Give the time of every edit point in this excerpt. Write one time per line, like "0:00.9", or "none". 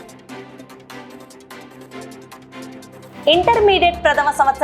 0:01.0
0:02.8